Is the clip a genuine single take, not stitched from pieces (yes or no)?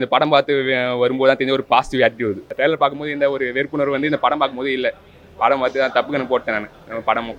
no